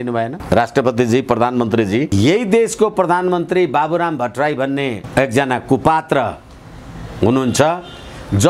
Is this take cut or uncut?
cut